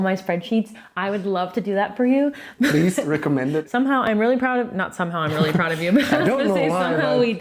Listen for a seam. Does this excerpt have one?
yes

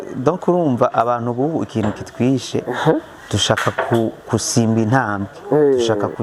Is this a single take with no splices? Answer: yes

